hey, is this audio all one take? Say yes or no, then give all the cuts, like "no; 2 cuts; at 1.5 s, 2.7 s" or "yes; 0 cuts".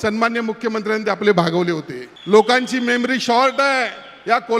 yes; 0 cuts